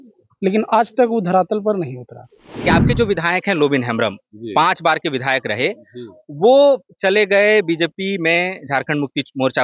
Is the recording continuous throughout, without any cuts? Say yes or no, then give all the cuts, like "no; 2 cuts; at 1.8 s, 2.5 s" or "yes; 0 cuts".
no; 1 cut; at 2.6 s